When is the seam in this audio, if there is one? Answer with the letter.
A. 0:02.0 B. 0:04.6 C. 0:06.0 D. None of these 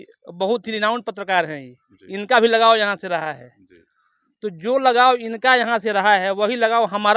D